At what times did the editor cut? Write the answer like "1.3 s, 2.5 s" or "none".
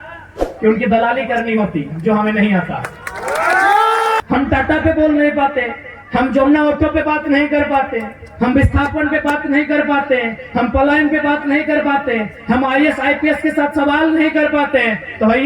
4.2 s